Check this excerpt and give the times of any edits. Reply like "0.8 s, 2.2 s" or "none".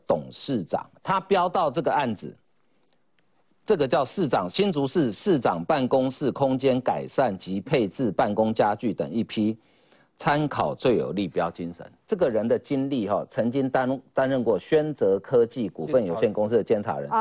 0.9 s, 11.9 s